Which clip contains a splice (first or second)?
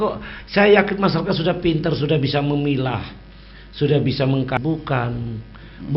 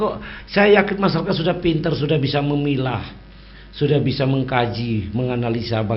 first